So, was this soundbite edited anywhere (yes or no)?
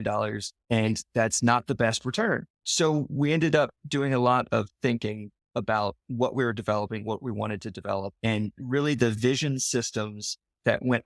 yes